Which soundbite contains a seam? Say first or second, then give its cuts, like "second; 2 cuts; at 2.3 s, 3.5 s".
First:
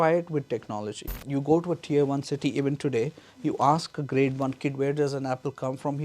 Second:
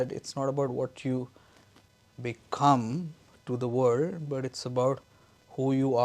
first; 1 cut; at 1.1 s